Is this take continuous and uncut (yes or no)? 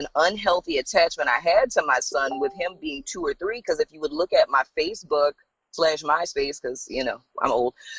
yes